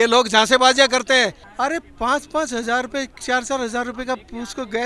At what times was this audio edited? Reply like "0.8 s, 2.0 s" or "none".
1.4 s